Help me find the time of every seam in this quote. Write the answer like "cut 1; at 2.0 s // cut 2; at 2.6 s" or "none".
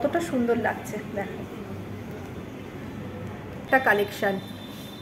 cut 1; at 3.6 s